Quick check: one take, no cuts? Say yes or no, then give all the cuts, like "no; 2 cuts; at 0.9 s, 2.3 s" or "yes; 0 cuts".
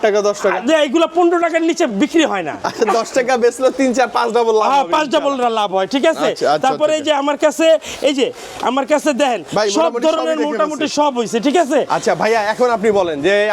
yes; 0 cuts